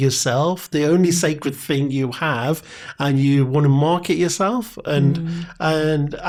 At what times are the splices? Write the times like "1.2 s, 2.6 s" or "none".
none